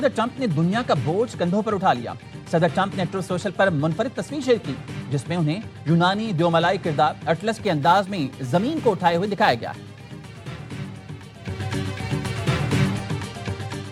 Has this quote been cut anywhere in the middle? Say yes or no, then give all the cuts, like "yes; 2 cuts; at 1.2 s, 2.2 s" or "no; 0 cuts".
yes; 1 cut; at 13.0 s